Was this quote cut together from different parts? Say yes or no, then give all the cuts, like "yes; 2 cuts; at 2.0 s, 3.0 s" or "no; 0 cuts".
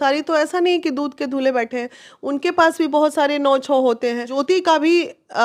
yes; 1 cut; at 4.3 s